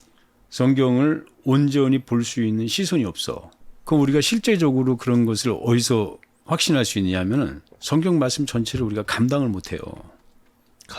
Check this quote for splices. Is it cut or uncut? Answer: uncut